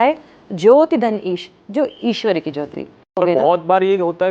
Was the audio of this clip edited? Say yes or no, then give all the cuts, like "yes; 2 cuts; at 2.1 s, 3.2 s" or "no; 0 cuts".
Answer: yes; 1 cut; at 3.1 s